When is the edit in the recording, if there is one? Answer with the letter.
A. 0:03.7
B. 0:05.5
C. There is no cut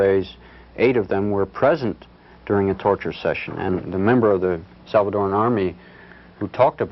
A